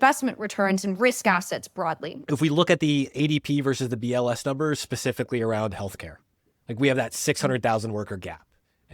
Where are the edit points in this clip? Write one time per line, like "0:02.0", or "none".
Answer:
0:02.1